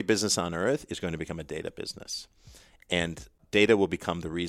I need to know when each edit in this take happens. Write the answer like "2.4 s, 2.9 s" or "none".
3.4 s